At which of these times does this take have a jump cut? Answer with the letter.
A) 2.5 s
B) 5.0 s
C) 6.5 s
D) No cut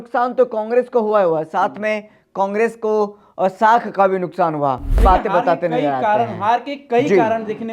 B